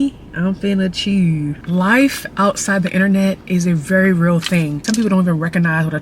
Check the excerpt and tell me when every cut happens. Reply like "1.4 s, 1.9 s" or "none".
1.6 s, 4.8 s